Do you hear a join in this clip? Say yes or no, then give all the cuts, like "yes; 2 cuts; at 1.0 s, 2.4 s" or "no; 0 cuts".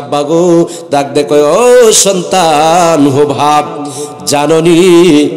no; 0 cuts